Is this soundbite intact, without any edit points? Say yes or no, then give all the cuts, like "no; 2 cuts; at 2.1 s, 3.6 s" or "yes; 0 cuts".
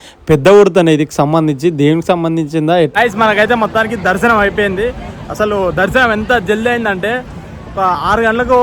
no; 1 cut; at 2.9 s